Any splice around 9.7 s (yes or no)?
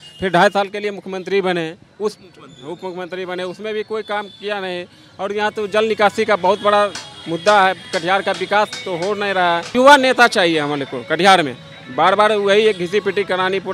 yes